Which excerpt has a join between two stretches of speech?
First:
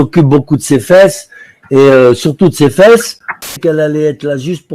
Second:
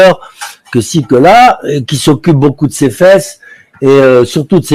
first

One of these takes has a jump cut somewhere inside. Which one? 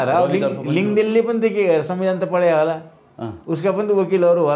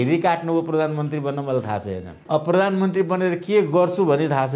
second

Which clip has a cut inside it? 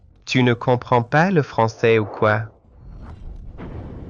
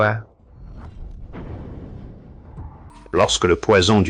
second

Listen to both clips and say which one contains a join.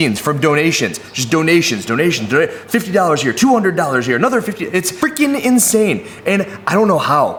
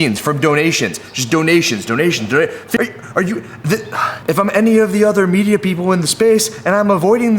second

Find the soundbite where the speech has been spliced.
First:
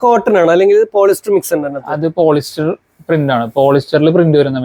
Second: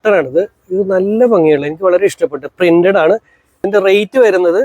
second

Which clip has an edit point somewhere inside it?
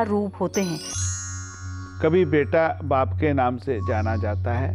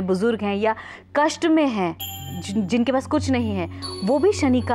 first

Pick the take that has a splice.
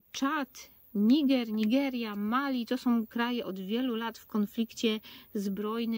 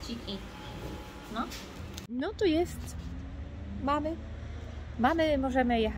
second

